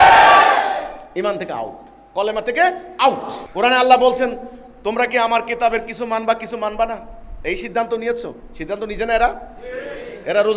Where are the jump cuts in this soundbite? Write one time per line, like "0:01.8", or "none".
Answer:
0:03.4

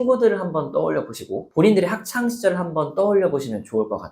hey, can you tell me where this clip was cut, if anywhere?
0:01.4

